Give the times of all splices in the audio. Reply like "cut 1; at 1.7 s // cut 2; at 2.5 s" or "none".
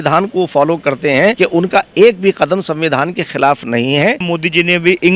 cut 1; at 1.3 s // cut 2; at 4.3 s